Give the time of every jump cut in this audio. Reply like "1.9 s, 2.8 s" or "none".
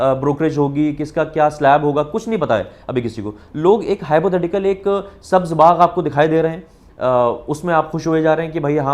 none